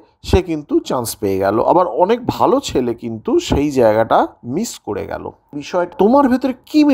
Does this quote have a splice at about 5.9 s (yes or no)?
yes